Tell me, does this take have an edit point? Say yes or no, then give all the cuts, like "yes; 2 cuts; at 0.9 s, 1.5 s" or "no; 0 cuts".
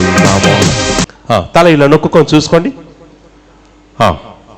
yes; 1 cut; at 1.1 s